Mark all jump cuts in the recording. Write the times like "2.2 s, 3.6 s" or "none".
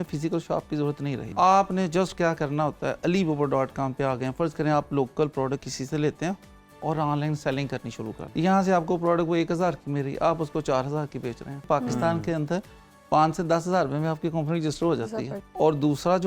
1.3 s, 8.2 s, 11.7 s, 15.4 s